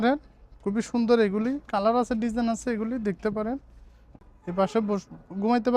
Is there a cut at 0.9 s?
no; 1 cut; at 4.2 s

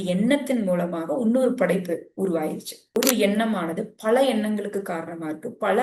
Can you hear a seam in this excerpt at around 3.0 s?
yes; 1 cut; at 3.0 s

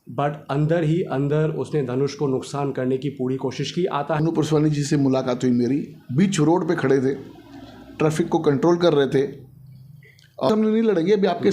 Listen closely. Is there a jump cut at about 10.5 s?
yes; 2 cuts; at 4.2 s, 10.5 s

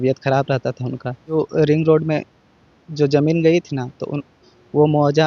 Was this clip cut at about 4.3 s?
no; 1 cut; at 1.3 s

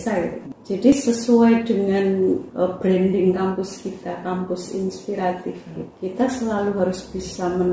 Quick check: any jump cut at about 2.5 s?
yes; 3 cuts; at 0.9 s, 2.5 s, 5.8 s

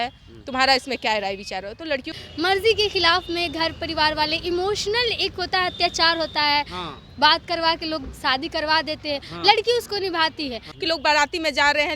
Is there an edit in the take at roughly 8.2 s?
no; 2 cuts; at 2.1 s, 10.7 s

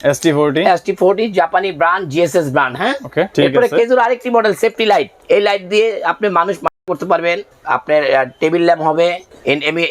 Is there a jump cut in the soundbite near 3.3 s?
yes; 2 cuts; at 3.3 s, 5.1 s

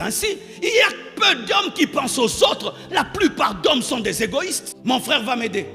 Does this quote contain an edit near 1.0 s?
no; 1 cut; at 4.7 s

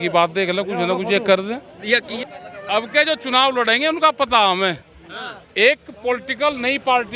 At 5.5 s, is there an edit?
no; 1 cut; at 2.1 s

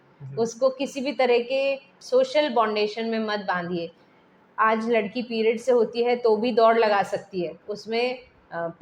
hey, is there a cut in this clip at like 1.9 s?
yes; 1 cut; at 1.9 s

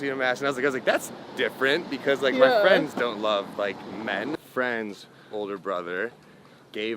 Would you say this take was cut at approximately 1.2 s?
no; 1 cut; at 4.4 s

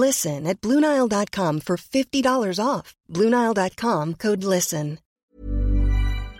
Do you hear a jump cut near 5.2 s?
yes; 1 cut; at 5.2 s

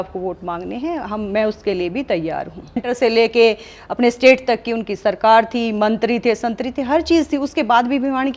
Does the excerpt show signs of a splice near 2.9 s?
yes; 1 cut; at 2.9 s

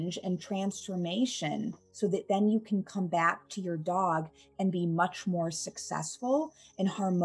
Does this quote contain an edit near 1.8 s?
yes; 1 cut; at 1.8 s

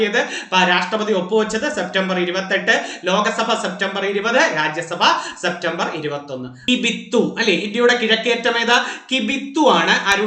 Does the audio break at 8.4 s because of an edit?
no; 1 cut; at 6.5 s

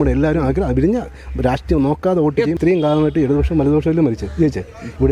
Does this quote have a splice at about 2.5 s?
yes; 1 cut; at 2.5 s

